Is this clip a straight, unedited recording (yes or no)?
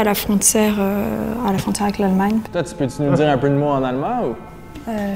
no